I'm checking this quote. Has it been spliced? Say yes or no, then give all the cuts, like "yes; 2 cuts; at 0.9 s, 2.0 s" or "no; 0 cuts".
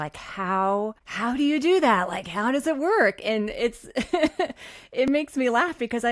yes; 1 cut; at 1.0 s